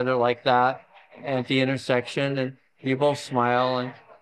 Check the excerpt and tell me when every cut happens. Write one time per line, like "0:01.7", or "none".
none